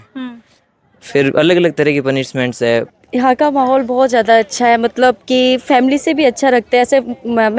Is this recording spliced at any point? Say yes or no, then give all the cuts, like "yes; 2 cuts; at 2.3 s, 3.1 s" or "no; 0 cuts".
yes; 1 cut; at 2.9 s